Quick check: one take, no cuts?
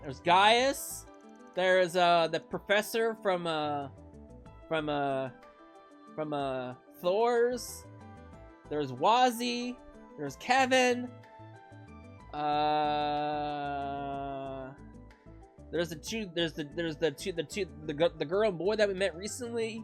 yes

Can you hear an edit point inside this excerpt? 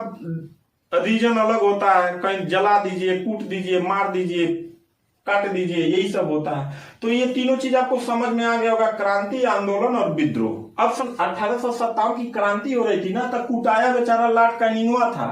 yes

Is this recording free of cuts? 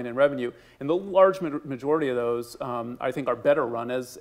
yes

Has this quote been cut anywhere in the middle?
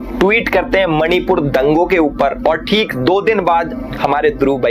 no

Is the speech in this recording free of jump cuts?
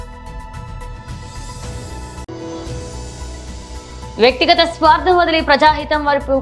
yes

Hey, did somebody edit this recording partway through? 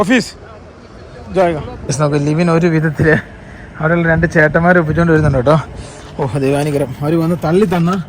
yes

